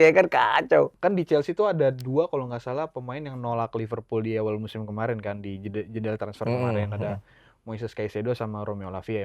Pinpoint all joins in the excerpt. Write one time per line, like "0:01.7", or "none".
0:00.9